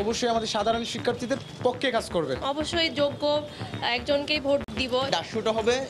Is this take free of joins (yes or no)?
no